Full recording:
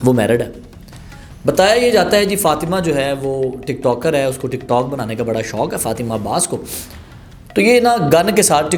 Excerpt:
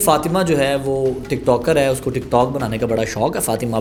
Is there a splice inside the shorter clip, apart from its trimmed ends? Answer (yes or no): no